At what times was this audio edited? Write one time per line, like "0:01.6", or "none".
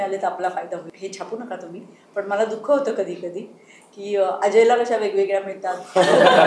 0:00.9